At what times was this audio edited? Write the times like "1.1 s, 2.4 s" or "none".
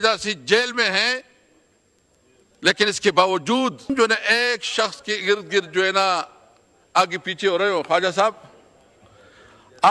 3.9 s